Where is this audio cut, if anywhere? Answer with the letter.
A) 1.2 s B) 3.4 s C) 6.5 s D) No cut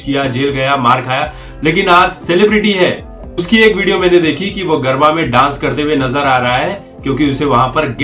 B